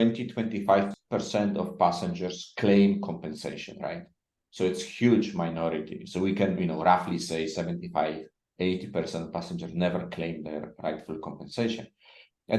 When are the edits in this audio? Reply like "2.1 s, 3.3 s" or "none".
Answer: 0.9 s